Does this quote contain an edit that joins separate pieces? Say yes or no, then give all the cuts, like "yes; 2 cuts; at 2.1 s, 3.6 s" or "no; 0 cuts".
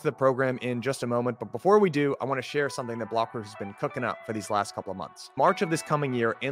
no; 0 cuts